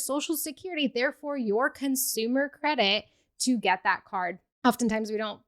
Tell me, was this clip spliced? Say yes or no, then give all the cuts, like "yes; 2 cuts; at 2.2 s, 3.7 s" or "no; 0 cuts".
yes; 1 cut; at 4.4 s